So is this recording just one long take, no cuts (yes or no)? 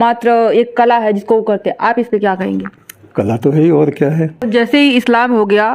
no